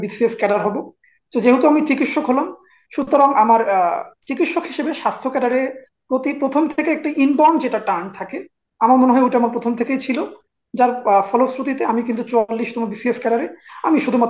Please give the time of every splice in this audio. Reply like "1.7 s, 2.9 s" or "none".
none